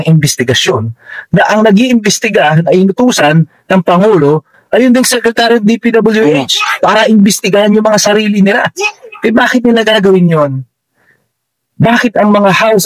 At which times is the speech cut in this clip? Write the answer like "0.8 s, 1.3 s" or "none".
none